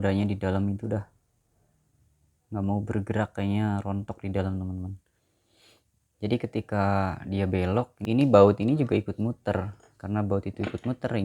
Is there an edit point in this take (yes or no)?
yes